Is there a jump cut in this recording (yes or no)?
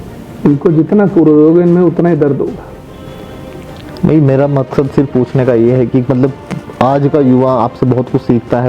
no